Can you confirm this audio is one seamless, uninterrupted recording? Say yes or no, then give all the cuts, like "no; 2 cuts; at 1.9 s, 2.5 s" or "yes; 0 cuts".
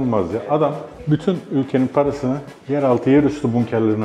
no; 2 cuts; at 0.9 s, 2.5 s